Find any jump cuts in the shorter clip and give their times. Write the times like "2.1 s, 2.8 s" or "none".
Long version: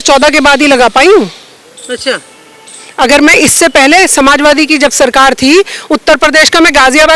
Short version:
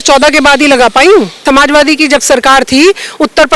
1.4 s